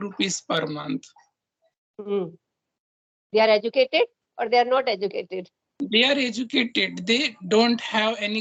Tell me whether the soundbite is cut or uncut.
uncut